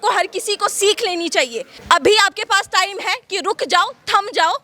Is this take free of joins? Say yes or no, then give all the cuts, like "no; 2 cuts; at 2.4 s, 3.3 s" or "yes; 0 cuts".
no; 1 cut; at 1.7 s